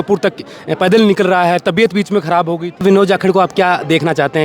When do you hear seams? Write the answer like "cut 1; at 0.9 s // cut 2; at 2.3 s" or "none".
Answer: cut 1; at 2.8 s